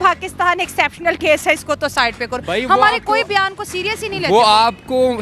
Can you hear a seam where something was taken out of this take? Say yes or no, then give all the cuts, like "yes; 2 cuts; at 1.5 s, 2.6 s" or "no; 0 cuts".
no; 0 cuts